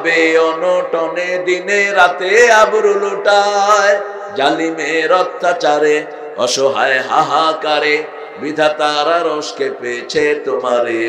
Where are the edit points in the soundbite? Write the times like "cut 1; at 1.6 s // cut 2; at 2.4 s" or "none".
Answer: none